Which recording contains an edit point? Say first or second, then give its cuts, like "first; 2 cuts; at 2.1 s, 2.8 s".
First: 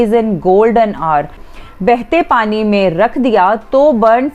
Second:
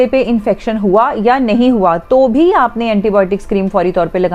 first; 1 cut; at 1.5 s